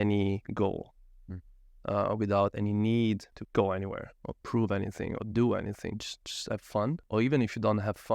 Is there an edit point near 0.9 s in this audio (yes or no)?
no